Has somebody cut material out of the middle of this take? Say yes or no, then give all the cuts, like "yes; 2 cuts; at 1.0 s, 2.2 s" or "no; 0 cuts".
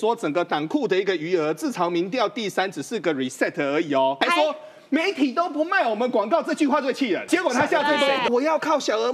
yes; 3 cuts; at 4.2 s, 7.2 s, 8.3 s